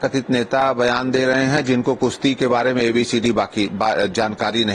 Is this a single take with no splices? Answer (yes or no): yes